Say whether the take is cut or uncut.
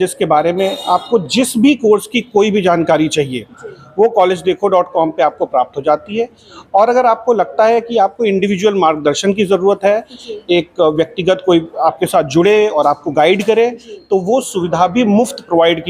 uncut